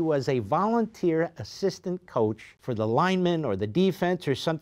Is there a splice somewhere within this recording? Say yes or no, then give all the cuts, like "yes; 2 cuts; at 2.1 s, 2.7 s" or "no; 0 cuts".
yes; 1 cut; at 2.5 s